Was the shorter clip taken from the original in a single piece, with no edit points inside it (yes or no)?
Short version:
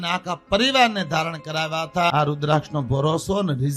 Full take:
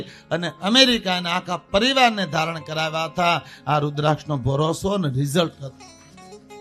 no